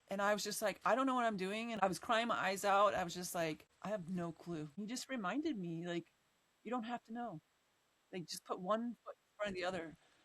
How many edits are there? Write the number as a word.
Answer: three